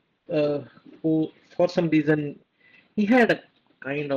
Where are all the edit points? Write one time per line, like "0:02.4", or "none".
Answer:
none